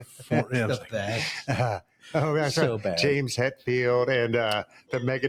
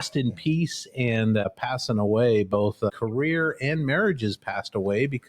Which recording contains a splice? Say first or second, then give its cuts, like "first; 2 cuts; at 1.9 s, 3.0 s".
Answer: second; 2 cuts; at 1.4 s, 2.9 s